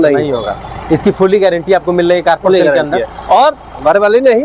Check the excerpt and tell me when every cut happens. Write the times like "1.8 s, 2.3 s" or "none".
none